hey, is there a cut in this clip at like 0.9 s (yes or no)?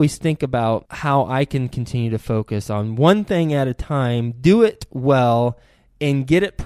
yes